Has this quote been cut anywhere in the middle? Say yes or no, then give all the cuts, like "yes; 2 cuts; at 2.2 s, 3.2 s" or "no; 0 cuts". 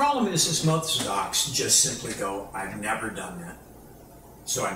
no; 0 cuts